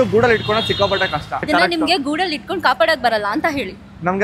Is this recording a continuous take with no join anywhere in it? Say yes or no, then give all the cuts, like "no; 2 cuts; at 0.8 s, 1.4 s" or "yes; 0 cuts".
no; 1 cut; at 1.3 s